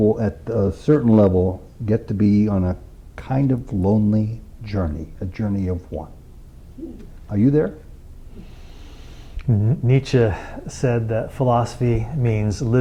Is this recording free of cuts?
yes; 0 cuts

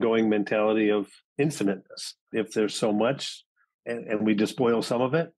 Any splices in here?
yes; 2 cuts; at 1.2 s, 2.3 s

